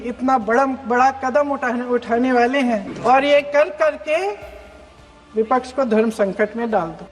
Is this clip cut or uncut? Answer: cut